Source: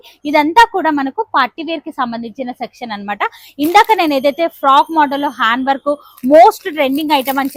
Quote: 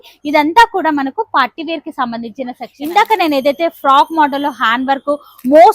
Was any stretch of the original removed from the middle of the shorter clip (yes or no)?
yes